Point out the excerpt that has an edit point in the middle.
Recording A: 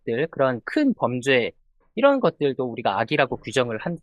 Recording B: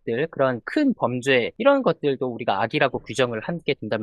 B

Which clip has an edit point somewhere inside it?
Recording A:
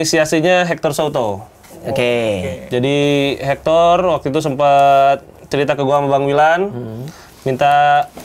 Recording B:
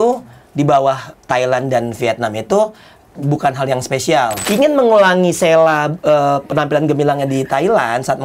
B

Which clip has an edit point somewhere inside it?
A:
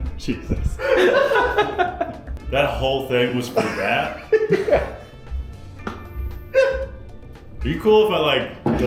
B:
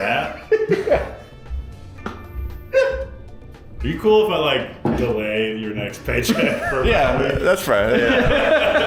A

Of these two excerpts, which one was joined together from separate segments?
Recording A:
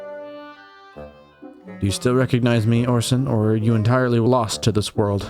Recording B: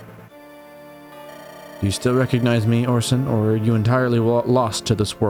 A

